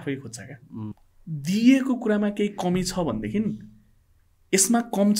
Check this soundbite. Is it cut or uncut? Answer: cut